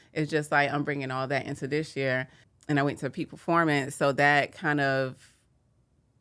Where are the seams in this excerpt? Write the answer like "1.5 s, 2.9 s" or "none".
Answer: 2.4 s